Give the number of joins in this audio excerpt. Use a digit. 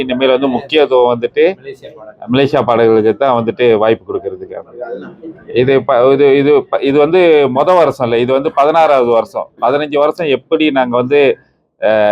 1